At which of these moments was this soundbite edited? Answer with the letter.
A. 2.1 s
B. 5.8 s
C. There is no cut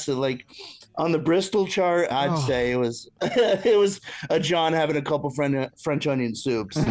A